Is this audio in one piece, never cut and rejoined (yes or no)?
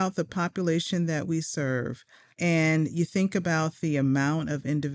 no